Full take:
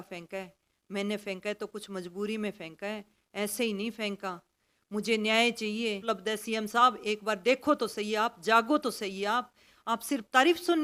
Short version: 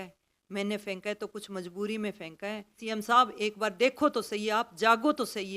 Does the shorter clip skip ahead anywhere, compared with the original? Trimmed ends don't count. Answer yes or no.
yes